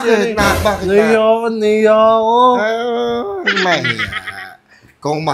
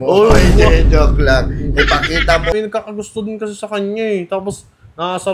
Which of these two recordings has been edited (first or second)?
second